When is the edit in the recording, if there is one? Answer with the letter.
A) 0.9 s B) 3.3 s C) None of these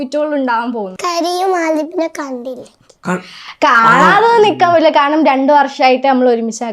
A